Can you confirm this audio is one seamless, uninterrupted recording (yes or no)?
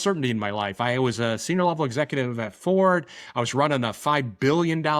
yes